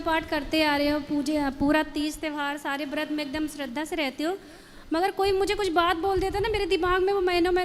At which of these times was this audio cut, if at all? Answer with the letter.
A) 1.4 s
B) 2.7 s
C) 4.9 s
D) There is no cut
D